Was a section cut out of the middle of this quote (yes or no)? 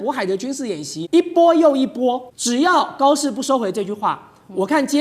yes